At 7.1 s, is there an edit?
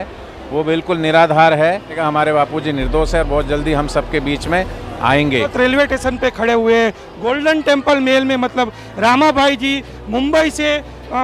no; 2 cuts; at 2.0 s, 5.5 s

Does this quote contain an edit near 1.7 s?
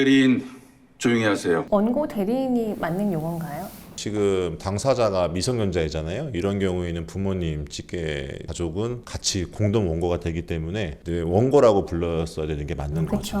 yes; 2 cuts; at 1.7 s, 3.9 s

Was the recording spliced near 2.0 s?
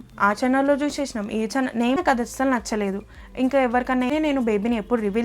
yes; 2 cuts; at 2.0 s, 4.1 s

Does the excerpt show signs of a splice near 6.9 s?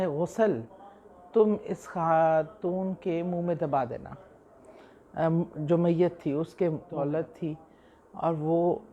yes; 1 cut; at 6.9 s

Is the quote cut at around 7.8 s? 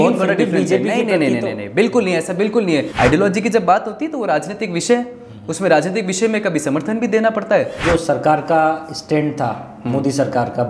yes; 2 cuts; at 2.9 s, 7.8 s

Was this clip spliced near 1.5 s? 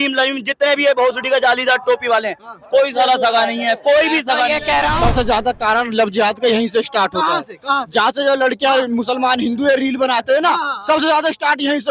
no; 1 cut; at 5.0 s

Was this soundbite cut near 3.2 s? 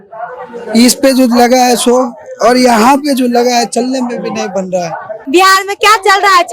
no; 1 cut; at 5.1 s

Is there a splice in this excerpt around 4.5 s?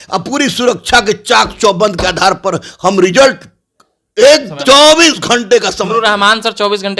yes; 1 cut; at 4.5 s

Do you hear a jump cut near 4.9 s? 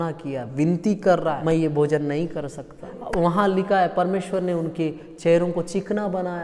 no; 2 cuts; at 1.4 s, 3.0 s

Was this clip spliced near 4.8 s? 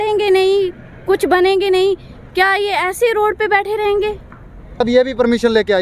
yes; 1 cut; at 4.8 s

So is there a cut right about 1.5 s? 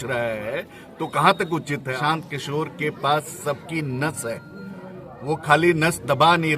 yes; 1 cut; at 1.5 s

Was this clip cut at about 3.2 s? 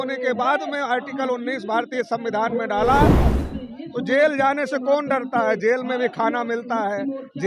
yes; 1 cut; at 3.2 s

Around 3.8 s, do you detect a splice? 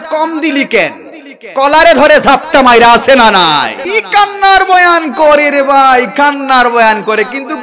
yes; 1 cut; at 3.8 s

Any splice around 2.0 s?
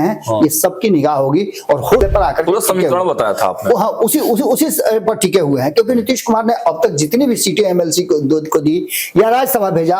yes; 1 cut; at 2.0 s

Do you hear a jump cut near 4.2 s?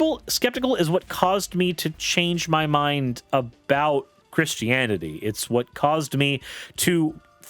yes; 1 cut; at 4.2 s

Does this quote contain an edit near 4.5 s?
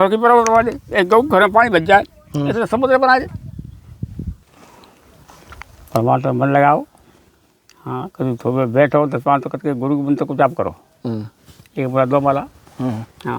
yes; 1 cut; at 4.5 s

